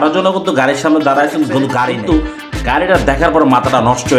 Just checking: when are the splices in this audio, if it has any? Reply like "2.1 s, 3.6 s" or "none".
1.9 s